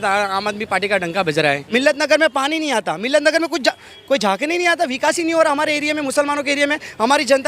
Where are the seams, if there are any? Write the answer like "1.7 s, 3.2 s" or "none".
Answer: 1.6 s